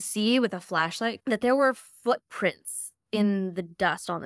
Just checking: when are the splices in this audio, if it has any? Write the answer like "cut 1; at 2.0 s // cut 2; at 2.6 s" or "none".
cut 1; at 1.2 s